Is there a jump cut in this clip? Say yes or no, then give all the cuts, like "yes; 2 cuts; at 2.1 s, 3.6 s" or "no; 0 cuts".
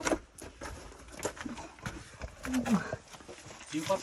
no; 0 cuts